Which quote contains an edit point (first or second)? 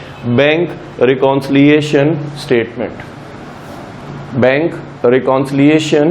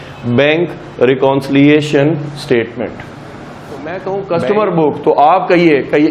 second